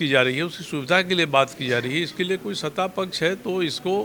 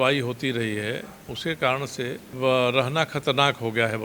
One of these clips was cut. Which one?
second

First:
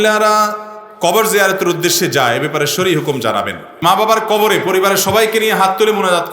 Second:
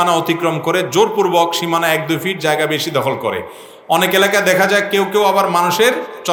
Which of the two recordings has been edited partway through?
first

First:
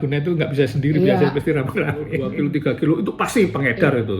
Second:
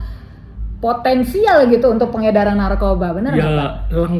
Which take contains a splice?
first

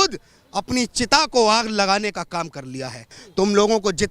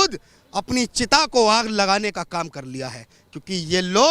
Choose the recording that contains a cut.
first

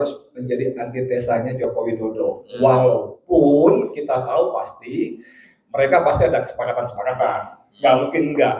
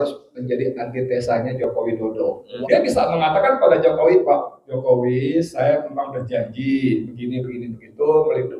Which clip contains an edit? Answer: second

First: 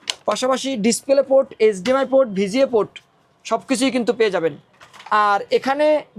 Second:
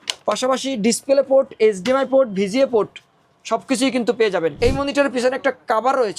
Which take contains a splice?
second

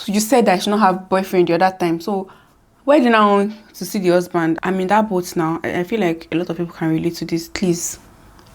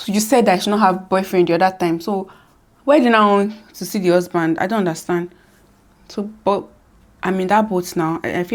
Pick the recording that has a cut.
first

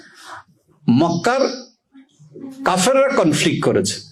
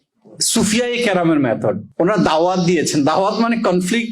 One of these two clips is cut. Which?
second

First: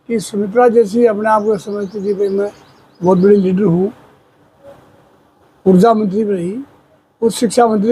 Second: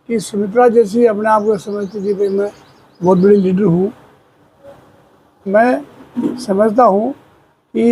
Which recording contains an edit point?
second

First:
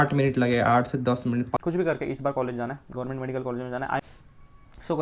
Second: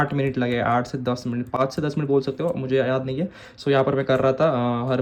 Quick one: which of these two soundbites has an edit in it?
first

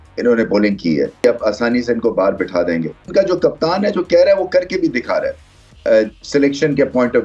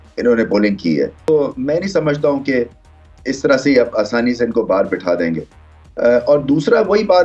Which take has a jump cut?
first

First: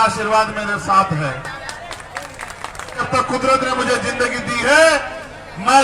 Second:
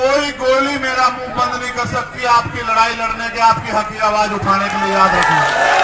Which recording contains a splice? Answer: first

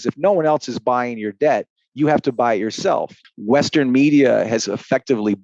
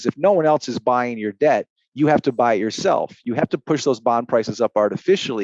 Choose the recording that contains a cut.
first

